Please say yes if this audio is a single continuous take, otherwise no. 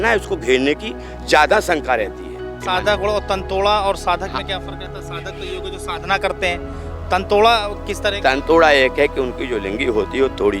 no